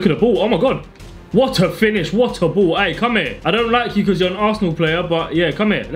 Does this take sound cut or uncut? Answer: cut